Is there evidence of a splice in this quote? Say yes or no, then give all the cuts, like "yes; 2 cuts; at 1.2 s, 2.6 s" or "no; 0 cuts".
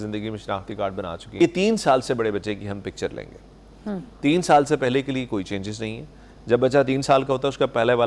yes; 1 cut; at 1.2 s